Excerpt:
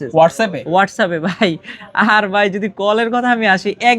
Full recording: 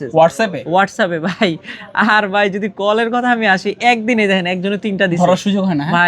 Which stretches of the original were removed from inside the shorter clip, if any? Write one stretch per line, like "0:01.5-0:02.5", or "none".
none